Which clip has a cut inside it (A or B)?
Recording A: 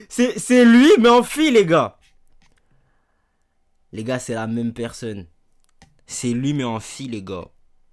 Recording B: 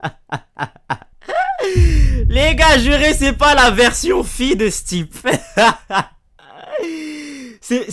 B